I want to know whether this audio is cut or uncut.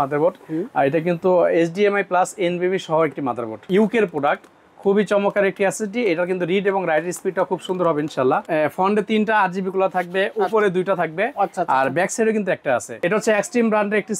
cut